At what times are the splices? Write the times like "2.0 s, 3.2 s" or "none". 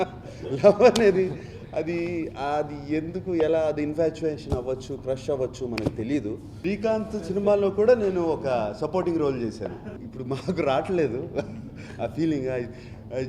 6.5 s, 10.0 s